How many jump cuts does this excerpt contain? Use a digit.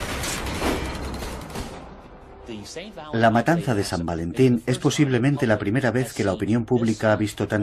0